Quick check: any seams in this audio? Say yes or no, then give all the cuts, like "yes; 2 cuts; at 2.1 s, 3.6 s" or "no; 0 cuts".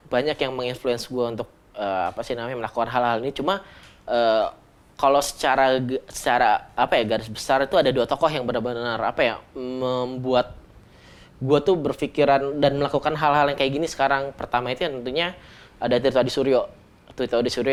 no; 0 cuts